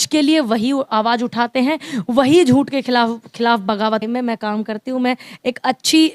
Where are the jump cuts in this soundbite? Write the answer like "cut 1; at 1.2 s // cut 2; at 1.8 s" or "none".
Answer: cut 1; at 4.0 s